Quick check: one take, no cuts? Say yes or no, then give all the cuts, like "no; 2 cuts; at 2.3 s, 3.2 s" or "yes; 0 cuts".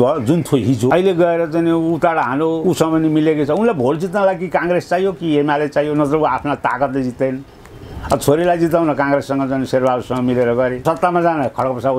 no; 3 cuts; at 0.9 s, 2.6 s, 10.8 s